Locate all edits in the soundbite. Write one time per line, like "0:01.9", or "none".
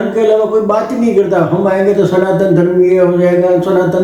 none